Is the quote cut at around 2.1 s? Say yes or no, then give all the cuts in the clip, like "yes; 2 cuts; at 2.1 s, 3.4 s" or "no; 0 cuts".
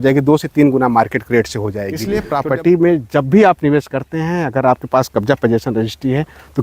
yes; 1 cut; at 2.1 s